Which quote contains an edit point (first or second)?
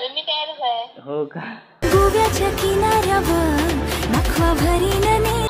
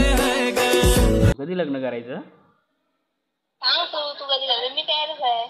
second